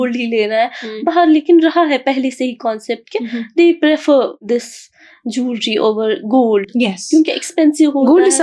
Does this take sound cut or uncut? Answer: uncut